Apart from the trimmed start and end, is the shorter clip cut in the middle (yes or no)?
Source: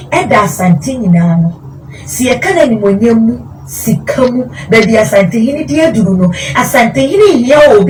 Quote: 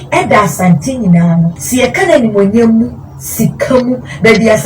yes